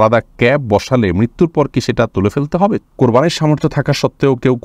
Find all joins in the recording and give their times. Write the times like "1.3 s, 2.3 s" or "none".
2.8 s

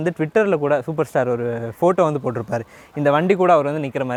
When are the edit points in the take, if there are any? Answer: none

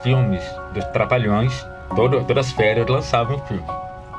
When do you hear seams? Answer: 1.8 s

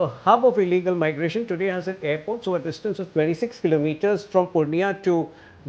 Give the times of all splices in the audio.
none

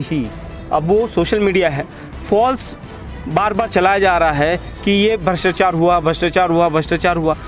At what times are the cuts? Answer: none

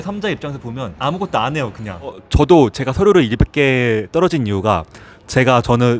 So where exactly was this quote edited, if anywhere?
0.9 s, 2.2 s

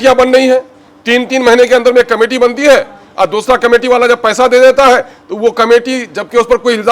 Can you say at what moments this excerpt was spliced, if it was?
none

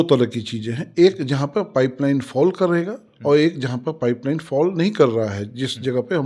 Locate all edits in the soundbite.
none

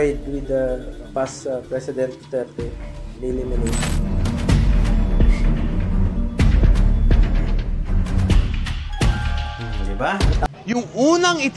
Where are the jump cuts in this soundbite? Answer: 10.5 s

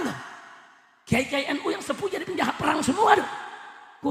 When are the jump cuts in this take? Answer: none

